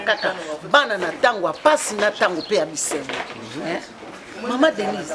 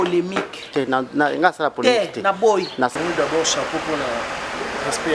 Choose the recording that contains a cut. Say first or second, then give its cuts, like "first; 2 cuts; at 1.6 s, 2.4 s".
second; 1 cut; at 2.9 s